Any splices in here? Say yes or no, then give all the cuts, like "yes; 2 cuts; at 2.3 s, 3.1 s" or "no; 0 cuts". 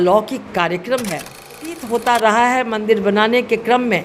yes; 1 cut; at 1.8 s